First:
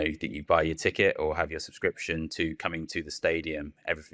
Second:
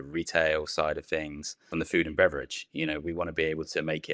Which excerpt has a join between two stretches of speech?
second; 1 cut; at 1.7 s

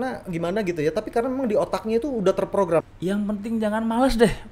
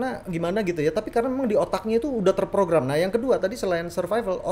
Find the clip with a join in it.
first; 1 cut; at 2.9 s

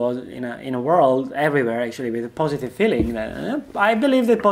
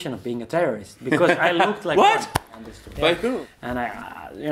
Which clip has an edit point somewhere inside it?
second; 1 cut; at 3.4 s

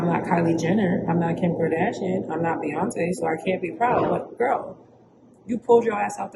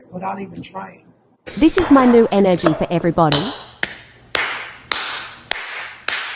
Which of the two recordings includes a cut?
second; 1 cut; at 1.3 s

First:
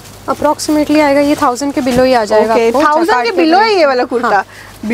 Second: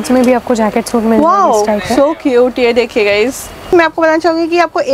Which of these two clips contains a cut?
second; 1 cut; at 3.7 s

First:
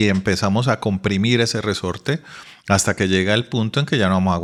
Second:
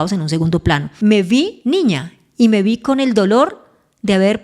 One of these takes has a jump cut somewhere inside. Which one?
second; 2 cuts; at 0.9 s, 1.6 s

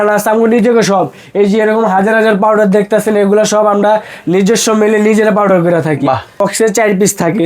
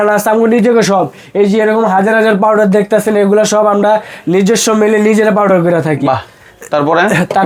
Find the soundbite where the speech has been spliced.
first; 1 cut; at 6.4 s

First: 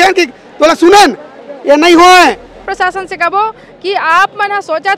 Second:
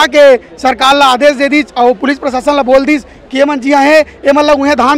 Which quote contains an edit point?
first; 1 cut; at 2.6 s

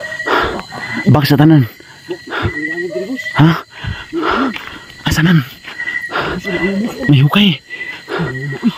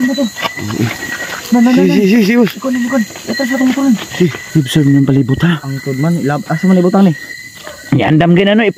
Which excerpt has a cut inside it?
second; 1 cut; at 4.4 s

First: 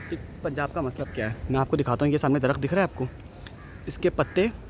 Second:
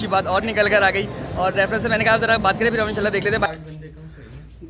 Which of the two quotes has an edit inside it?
second; 1 cut; at 3.5 s

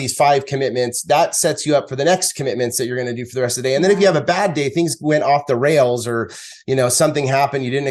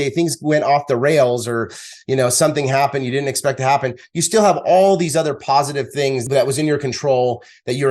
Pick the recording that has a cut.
second; 1 cut; at 6.2 s

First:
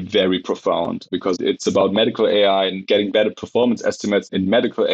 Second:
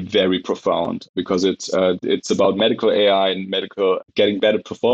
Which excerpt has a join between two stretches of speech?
first; 2 cuts; at 1.3 s, 2.8 s

